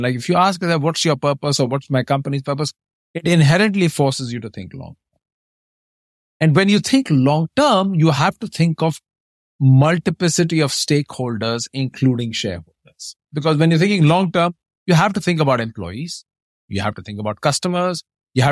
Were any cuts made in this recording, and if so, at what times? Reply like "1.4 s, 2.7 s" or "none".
none